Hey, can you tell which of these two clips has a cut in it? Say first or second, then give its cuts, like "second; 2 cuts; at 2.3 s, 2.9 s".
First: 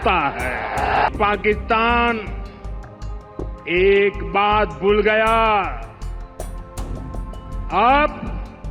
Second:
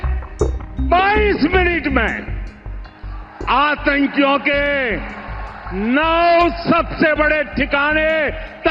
first; 5 cuts; at 1.1 s, 2.3 s, 3.7 s, 5.8 s, 7.3 s